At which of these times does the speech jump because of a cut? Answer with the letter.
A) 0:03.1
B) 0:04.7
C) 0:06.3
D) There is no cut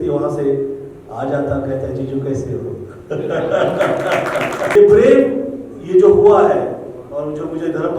B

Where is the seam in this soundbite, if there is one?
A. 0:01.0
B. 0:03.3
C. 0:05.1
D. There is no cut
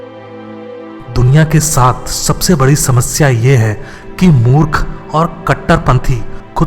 A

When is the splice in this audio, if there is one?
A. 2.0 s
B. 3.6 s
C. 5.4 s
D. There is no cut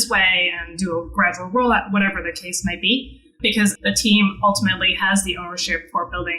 B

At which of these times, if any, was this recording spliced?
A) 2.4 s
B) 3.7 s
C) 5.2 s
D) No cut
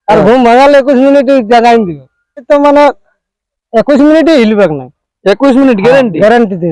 A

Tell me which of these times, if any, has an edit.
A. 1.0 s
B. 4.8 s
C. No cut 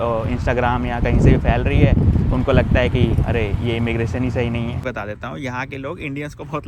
B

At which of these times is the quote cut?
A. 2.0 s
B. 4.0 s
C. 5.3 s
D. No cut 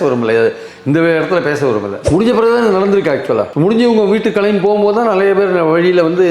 A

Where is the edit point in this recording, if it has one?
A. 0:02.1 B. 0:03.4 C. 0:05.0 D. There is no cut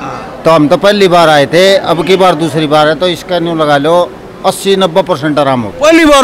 D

